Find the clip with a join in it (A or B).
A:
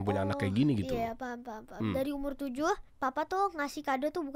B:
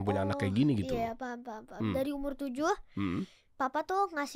A